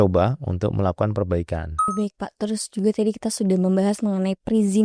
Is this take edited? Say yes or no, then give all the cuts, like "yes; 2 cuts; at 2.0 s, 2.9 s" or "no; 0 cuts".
yes; 1 cut; at 1.8 s